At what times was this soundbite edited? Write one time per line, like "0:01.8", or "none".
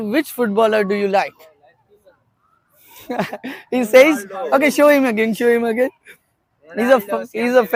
none